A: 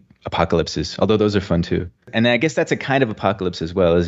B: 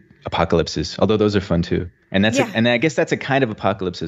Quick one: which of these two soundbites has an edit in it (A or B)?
A